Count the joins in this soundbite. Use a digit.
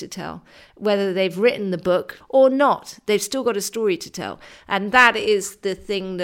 1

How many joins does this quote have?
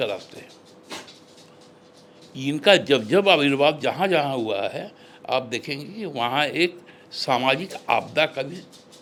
0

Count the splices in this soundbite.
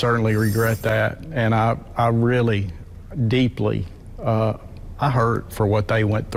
0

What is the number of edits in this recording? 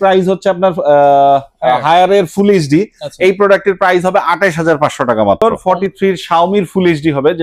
1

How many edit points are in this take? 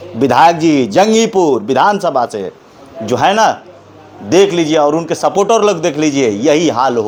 0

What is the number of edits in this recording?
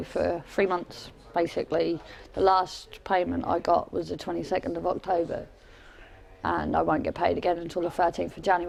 0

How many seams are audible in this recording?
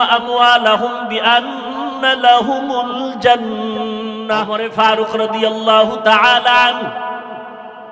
1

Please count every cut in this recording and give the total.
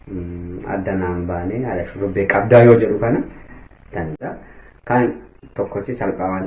1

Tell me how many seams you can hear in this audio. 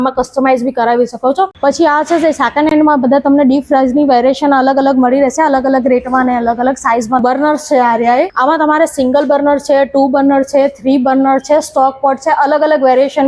3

